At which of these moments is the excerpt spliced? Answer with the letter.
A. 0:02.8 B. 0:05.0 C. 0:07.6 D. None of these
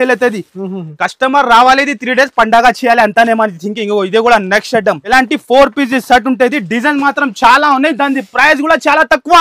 B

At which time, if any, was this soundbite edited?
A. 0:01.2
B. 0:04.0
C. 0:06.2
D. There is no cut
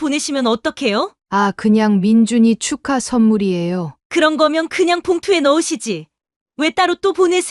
A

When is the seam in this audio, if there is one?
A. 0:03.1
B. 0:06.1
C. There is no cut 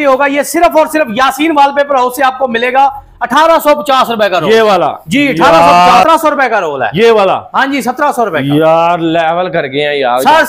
B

